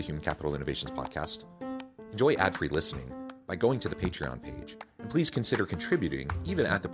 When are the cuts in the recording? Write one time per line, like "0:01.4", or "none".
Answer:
none